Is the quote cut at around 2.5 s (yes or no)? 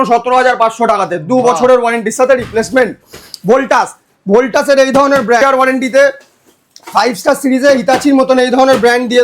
no